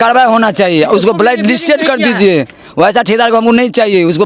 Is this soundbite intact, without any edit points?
yes; 0 cuts

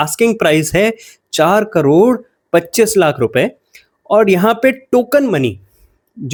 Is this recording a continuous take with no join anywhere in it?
yes; 0 cuts

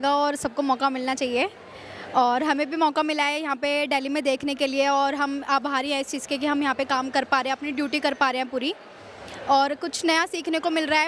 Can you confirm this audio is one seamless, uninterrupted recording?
yes; 0 cuts

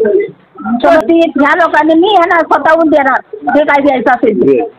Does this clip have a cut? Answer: yes; 1 cut; at 0.9 s

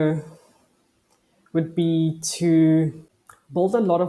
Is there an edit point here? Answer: no; 0 cuts

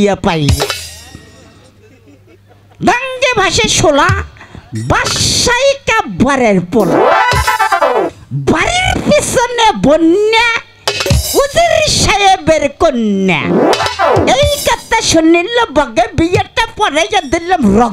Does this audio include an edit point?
no; 0 cuts

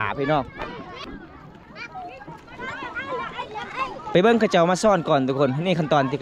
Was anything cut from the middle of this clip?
yes; 1 cut; at 1.0 s

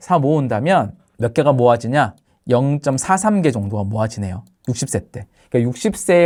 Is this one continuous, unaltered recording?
yes; 0 cuts

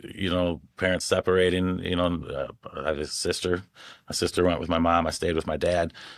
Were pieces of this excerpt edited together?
no; 0 cuts

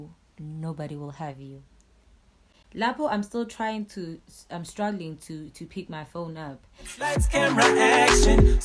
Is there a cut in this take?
yes; 1 cut; at 6.7 s

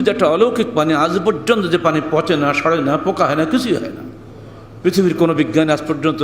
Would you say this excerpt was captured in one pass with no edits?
yes; 0 cuts

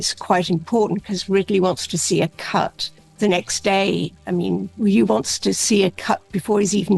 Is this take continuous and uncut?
yes; 0 cuts

